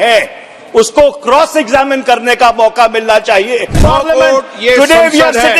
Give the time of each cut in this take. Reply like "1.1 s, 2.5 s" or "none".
3.8 s

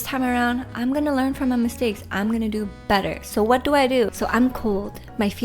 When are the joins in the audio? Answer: 4.1 s

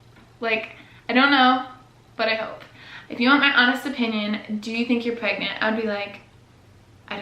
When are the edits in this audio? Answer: 3.0 s

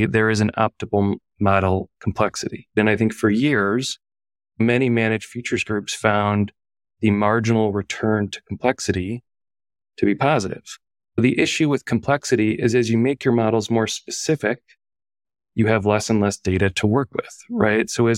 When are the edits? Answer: 2.8 s, 11.0 s

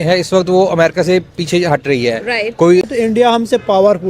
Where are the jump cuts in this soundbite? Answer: 2.9 s

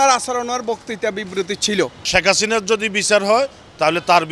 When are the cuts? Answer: 2.0 s

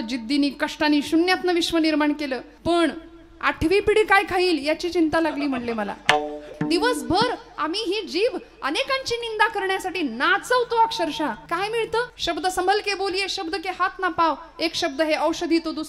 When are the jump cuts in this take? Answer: 2.5 s, 6.5 s, 11.4 s, 12.1 s

